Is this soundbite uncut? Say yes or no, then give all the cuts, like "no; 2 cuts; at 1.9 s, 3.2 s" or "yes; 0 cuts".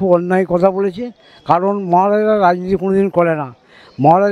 yes; 0 cuts